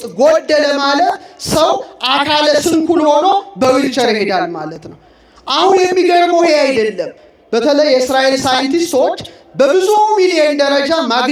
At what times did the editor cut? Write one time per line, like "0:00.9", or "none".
none